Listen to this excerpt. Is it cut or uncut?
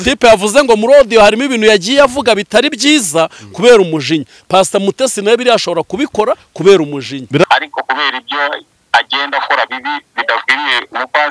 cut